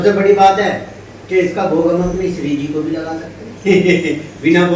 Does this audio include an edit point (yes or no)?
no